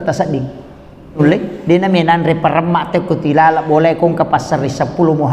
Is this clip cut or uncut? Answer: cut